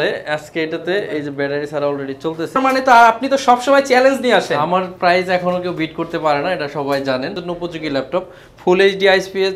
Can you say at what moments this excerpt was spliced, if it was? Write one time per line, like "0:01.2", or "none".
0:02.6
0:07.4